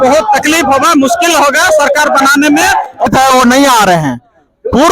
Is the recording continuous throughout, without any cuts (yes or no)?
no